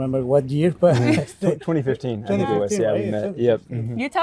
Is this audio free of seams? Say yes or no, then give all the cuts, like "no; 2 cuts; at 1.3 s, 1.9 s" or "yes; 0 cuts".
yes; 0 cuts